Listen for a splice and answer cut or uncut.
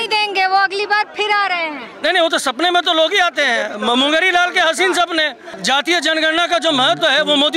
cut